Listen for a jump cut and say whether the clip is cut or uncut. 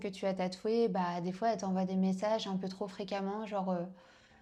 uncut